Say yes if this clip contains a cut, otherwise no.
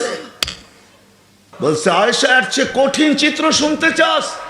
yes